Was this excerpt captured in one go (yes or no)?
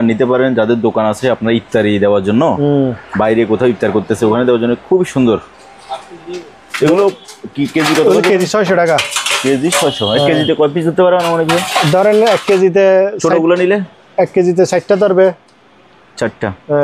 yes